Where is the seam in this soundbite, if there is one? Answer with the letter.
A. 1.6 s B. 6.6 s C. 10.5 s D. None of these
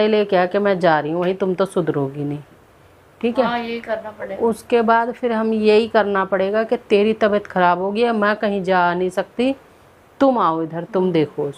D